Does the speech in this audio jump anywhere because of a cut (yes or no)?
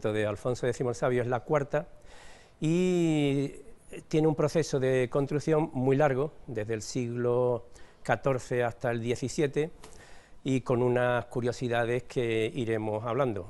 no